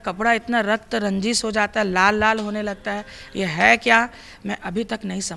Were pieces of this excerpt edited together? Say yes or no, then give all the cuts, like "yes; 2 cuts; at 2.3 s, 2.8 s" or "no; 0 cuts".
no; 0 cuts